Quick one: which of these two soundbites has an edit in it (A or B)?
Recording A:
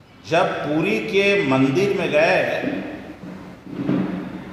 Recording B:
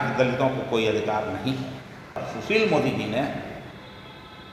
B